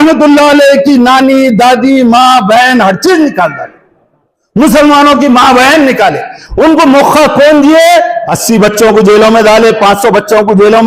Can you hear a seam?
yes; 1 cut; at 8.3 s

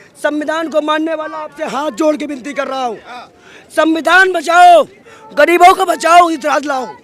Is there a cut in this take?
no; 0 cuts

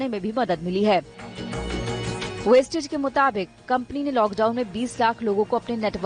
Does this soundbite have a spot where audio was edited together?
no; 0 cuts

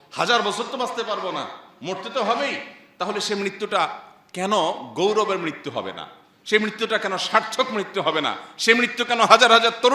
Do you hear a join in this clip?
no; 0 cuts

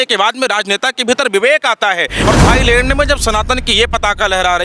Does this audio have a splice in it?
yes; 1 cut; at 2.3 s

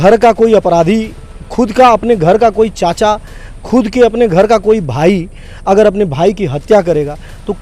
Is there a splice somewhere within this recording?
no; 0 cuts

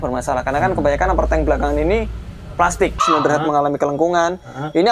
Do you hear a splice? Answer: yes; 1 cut; at 3.0 s

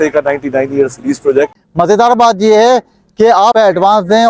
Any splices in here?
yes; 1 cut; at 1.6 s

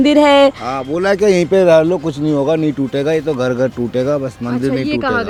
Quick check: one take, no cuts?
yes; 0 cuts

